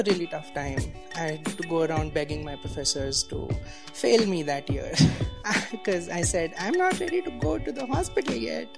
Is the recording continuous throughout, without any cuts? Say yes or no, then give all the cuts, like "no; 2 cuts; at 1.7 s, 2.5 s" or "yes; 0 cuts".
yes; 0 cuts